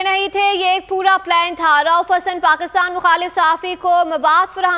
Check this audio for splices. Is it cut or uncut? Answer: uncut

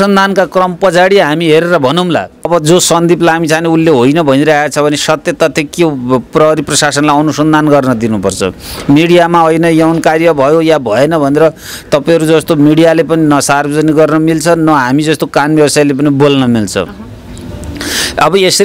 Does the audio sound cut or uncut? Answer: cut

